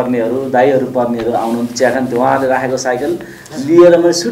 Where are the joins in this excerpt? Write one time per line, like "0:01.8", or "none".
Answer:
none